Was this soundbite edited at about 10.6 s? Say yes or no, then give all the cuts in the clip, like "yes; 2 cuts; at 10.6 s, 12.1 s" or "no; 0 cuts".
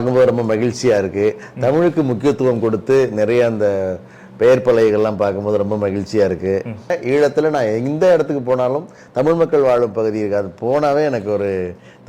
no; 1 cut; at 7.0 s